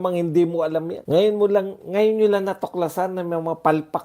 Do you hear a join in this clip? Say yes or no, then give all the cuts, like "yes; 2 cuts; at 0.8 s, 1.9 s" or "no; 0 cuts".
yes; 1 cut; at 1.0 s